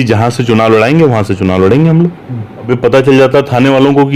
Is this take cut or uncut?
cut